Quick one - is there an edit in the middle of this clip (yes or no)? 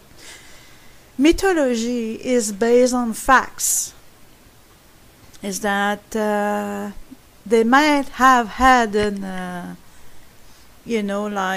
no